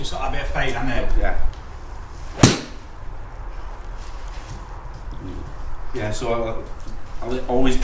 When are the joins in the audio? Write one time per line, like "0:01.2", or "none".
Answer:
0:01.5